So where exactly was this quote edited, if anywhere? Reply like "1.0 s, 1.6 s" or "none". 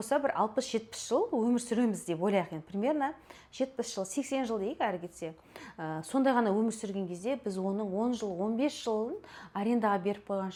none